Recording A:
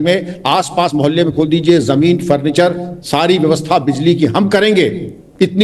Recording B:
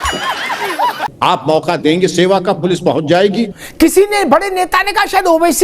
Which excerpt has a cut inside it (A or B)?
B